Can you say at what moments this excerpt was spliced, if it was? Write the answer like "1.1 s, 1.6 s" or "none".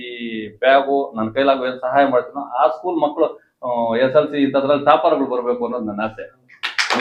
none